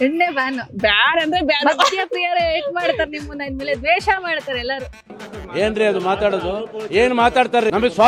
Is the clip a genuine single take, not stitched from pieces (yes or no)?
yes